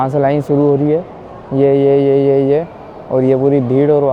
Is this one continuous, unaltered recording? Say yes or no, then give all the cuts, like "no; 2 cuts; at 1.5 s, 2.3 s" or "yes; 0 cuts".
yes; 0 cuts